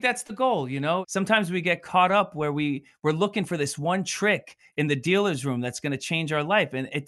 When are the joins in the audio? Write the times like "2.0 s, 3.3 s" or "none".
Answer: 1.0 s